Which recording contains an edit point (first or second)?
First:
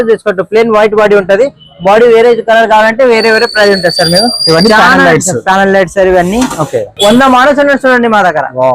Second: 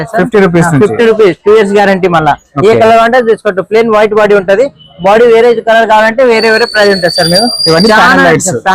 first